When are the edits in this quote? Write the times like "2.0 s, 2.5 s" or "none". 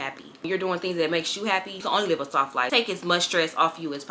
1.8 s, 2.7 s